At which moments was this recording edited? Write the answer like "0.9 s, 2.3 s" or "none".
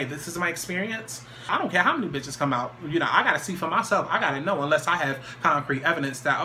1.5 s